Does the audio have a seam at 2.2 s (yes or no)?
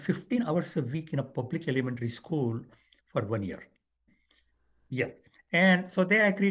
no